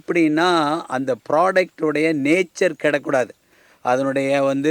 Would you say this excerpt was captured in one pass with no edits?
yes; 0 cuts

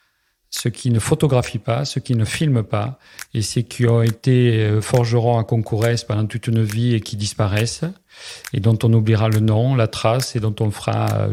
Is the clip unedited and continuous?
yes; 0 cuts

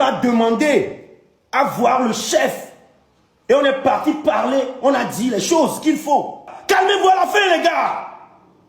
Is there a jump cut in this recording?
yes; 1 cut; at 6.5 s

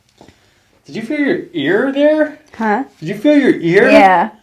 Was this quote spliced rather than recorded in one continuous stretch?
no; 0 cuts

